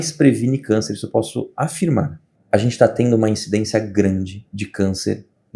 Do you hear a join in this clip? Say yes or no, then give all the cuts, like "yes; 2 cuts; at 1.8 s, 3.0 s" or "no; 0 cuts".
yes; 1 cut; at 2.3 s